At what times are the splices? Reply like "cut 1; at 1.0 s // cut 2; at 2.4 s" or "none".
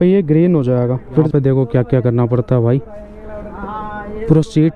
cut 1; at 1.3 s